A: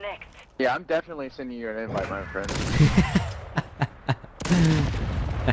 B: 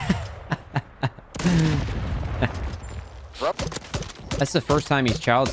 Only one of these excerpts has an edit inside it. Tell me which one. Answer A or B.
B